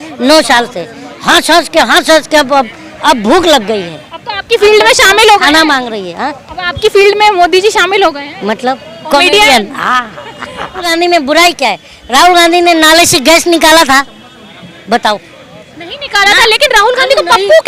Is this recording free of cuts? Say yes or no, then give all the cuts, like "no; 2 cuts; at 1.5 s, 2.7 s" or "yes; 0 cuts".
no; 1 cut; at 10.9 s